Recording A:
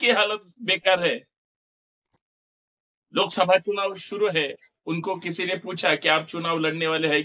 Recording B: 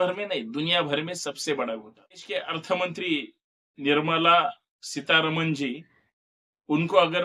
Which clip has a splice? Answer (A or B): B